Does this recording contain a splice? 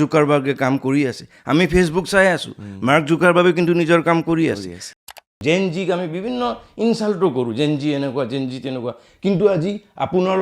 yes; 1 cut; at 5.0 s

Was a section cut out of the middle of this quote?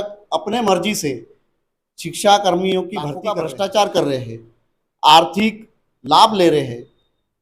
yes; 1 cut; at 3.2 s

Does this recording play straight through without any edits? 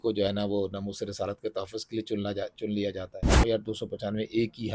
no; 1 cut; at 3.4 s

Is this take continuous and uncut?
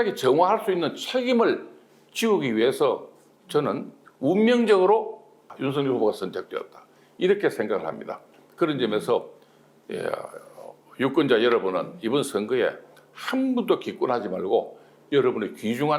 no; 1 cut; at 5.5 s

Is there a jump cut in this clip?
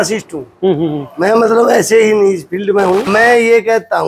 yes; 1 cut; at 3.1 s

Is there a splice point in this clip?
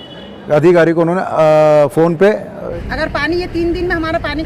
yes; 1 cut; at 2.6 s

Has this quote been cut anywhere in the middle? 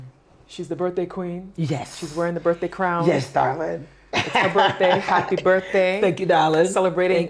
no; 0 cuts

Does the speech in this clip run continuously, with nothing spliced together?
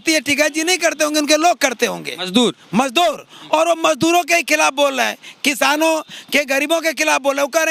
yes; 0 cuts

